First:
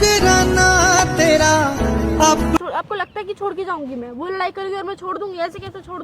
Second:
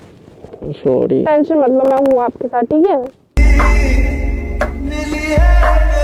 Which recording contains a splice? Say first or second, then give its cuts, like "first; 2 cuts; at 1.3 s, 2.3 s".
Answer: first; 1 cut; at 2.6 s